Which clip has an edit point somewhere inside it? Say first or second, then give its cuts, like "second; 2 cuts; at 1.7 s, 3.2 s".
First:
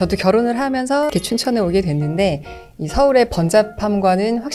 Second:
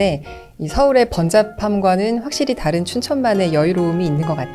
first; 1 cut; at 1.1 s